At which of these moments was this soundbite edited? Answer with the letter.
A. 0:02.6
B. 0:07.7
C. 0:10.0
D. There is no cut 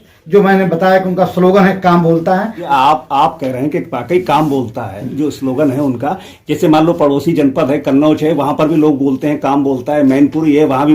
A